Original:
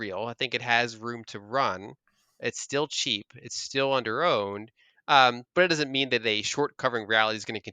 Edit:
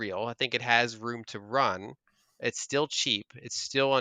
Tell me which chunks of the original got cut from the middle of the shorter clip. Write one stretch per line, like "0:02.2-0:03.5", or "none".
none